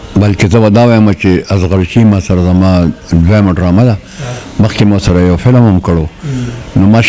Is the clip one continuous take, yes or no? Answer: yes